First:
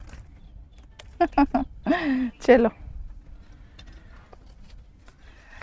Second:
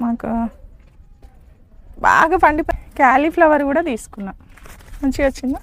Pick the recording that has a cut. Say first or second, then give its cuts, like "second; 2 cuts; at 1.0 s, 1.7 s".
second; 1 cut; at 2.7 s